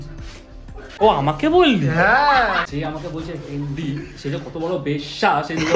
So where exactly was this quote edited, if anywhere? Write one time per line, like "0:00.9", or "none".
0:02.7